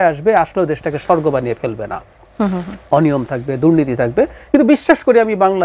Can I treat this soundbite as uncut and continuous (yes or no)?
yes